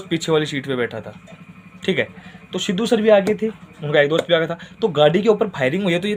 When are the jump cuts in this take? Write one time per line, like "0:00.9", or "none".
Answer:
none